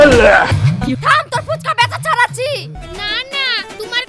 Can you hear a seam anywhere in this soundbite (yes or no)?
yes